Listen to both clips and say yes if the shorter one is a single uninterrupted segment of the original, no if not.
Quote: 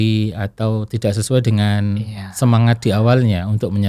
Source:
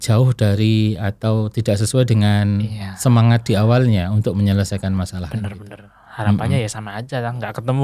yes